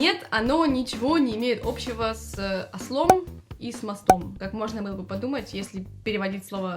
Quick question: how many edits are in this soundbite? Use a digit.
1